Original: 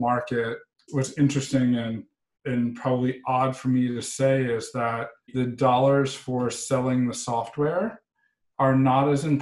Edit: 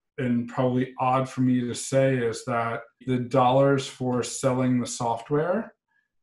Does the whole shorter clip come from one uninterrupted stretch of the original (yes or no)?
yes